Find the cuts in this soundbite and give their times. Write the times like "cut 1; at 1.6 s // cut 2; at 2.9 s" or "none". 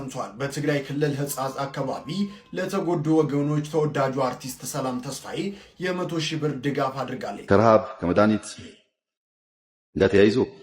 cut 1; at 7.5 s